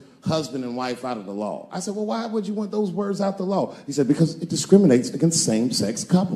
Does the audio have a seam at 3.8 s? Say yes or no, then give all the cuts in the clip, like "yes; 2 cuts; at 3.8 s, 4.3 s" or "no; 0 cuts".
no; 0 cuts